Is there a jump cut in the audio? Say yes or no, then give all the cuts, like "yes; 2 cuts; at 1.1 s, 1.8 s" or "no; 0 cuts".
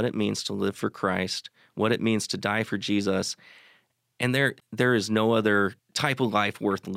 yes; 2 cuts; at 4.6 s, 5.9 s